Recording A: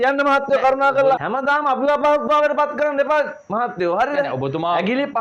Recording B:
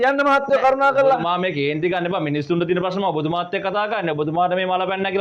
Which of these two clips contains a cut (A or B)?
A